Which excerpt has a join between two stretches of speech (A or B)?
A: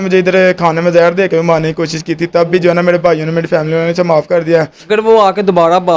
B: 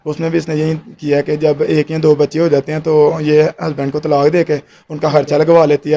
A